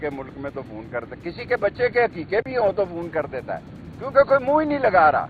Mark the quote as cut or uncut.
uncut